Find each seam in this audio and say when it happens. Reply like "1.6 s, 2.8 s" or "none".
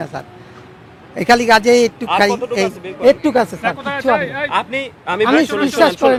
none